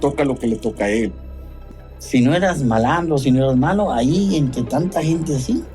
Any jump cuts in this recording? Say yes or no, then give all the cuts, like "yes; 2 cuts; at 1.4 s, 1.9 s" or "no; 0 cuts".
yes; 1 cut; at 1.6 s